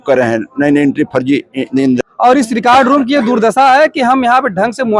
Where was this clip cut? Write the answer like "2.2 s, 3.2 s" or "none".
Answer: 2.0 s